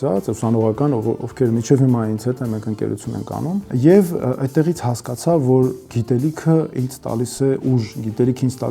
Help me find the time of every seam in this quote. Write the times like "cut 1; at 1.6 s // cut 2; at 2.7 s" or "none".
cut 1; at 3.7 s